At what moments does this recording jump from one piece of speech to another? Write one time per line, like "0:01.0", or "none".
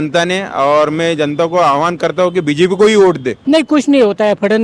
0:03.3